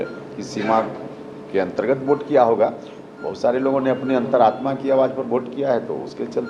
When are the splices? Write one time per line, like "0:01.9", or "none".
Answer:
none

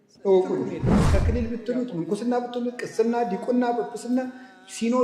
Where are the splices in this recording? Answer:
0:01.1

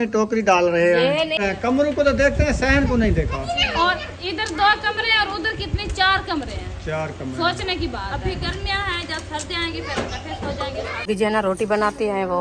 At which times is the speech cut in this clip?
0:01.4
0:11.1

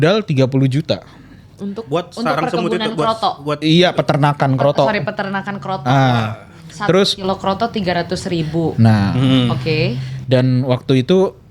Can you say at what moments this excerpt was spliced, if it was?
none

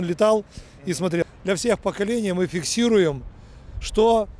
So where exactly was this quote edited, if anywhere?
0:01.2

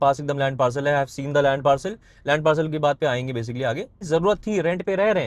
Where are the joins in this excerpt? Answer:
0:04.0

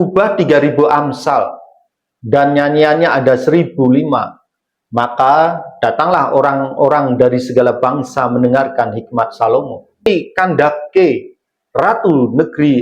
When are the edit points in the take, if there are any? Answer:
0:10.1

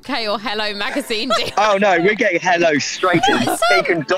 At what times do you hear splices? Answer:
0:01.3
0:03.5

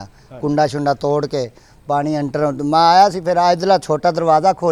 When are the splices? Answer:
none

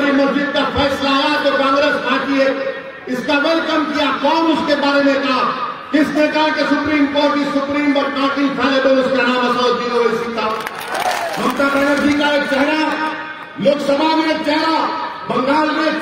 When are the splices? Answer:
0:11.0

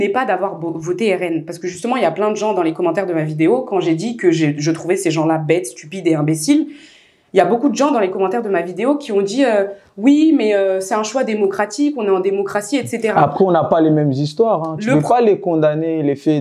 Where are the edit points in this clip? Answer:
none

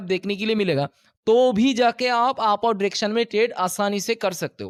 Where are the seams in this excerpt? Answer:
none

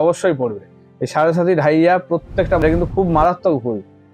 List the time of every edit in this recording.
0:02.6

